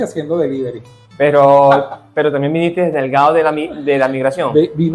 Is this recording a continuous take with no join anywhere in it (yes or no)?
yes